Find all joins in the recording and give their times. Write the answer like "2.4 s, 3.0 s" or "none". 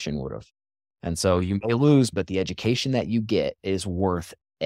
2.1 s, 3.6 s